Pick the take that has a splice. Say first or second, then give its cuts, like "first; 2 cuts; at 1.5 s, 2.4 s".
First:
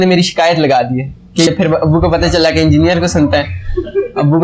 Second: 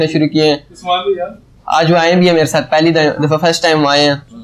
first; 1 cut; at 1.5 s